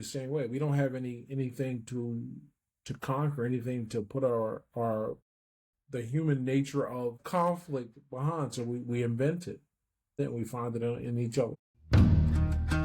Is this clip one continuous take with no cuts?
no; 3 cuts; at 7.2 s, 10.2 s, 11.7 s

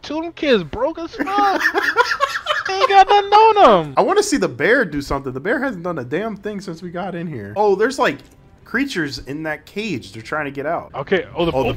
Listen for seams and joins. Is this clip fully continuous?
yes; 0 cuts

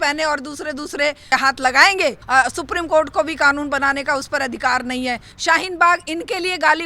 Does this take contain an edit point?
yes; 3 cuts; at 1.3 s, 2.2 s, 5.3 s

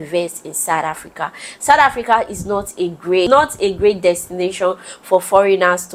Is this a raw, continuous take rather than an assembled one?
yes; 0 cuts

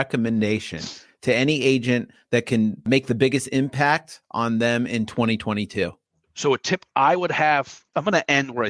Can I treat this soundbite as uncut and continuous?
no; 2 cuts; at 6.0 s, 7.8 s

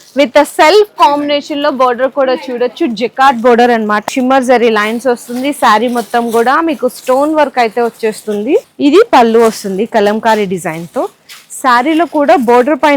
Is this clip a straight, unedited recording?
no; 2 cuts; at 4.0 s, 8.7 s

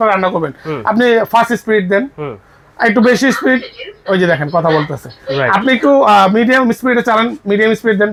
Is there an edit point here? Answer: no; 0 cuts

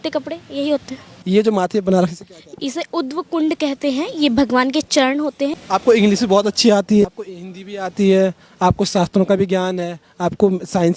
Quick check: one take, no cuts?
no; 3 cuts; at 1.1 s, 5.6 s, 7.1 s

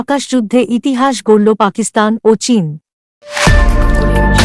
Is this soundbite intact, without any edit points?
no; 1 cut; at 3.0 s

